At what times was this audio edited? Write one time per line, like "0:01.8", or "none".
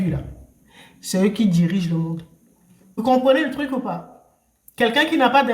0:03.0